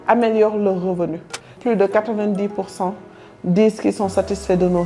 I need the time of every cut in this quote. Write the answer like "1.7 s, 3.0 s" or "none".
1.5 s

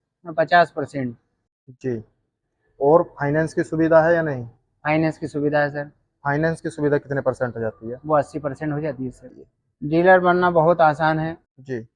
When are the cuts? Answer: 9.3 s

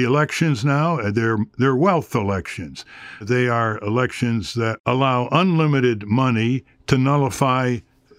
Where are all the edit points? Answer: 4.8 s

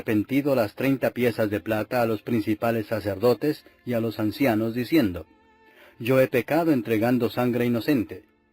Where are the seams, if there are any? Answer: 7.3 s

